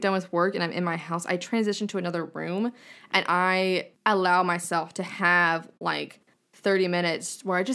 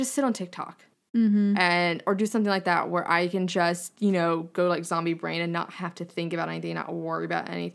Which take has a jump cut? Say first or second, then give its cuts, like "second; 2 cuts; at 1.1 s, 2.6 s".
first; 1 cut; at 3.9 s